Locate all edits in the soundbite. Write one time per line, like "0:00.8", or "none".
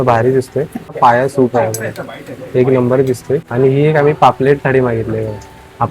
0:00.9
0:03.5